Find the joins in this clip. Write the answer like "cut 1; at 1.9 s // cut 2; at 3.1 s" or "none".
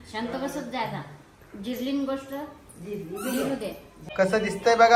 cut 1; at 4.0 s